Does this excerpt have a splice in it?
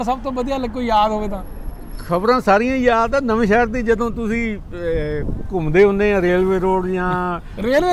no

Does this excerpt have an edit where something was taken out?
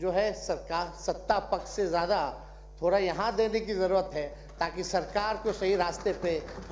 no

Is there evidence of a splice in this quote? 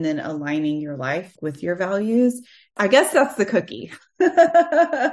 yes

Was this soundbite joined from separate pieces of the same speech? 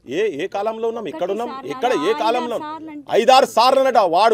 no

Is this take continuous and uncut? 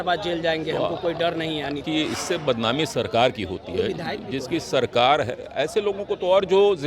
no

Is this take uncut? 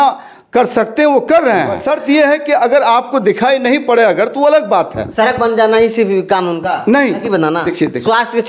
no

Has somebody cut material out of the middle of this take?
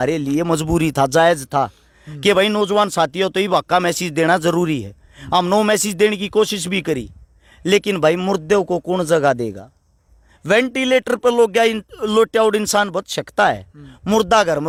no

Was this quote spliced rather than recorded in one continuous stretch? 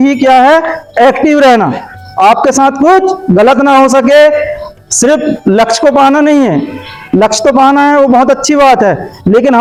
no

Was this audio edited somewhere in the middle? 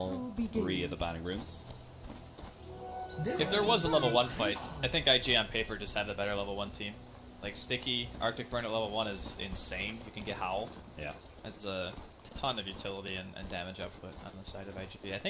no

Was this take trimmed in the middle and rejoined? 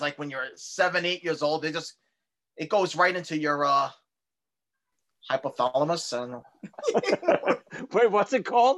no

